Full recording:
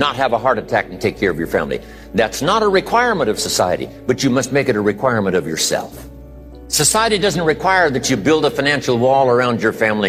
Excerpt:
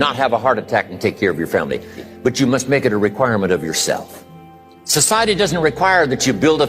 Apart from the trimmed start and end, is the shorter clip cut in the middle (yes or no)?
yes